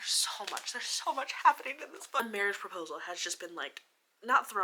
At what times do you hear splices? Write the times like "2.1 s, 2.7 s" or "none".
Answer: none